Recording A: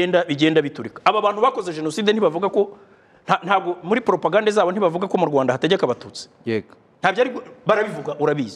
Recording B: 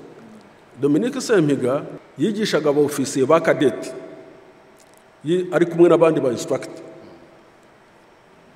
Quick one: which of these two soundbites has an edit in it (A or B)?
B